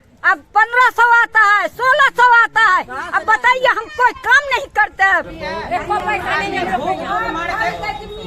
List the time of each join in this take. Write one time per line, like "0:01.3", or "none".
0:05.3

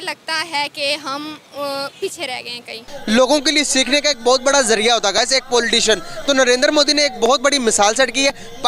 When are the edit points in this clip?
0:02.9

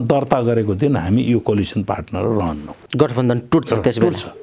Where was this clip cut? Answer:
none

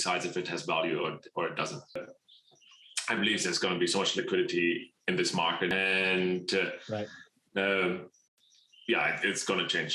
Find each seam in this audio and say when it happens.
0:02.0
0:05.7

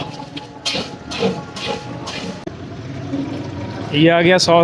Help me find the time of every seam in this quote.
0:02.4

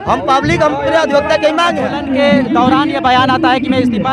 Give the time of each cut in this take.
0:01.9

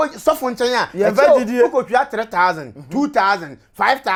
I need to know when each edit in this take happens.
none

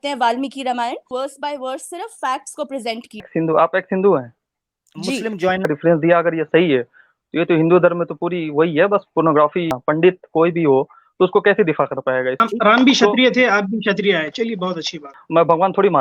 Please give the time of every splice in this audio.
0:01.1
0:03.3
0:05.7
0:09.8
0:12.4
0:15.1

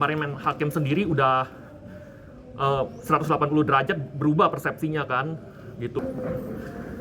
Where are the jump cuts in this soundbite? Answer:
0:06.0

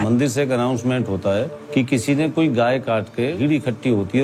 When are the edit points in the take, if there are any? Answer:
0:01.6
0:03.4

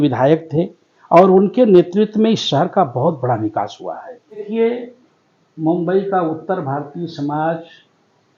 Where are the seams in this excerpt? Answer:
0:04.4

